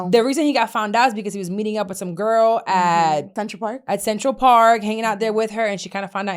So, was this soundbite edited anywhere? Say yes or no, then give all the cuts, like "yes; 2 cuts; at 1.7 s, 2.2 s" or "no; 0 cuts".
yes; 1 cut; at 3.4 s